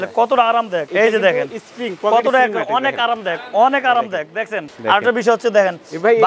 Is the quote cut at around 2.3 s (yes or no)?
no